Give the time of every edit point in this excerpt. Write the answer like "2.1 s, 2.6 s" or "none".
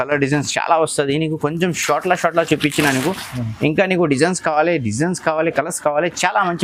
none